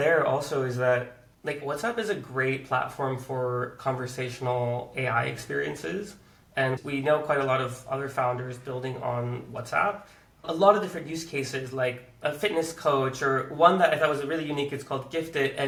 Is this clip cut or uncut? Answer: uncut